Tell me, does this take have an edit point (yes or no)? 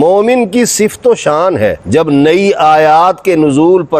yes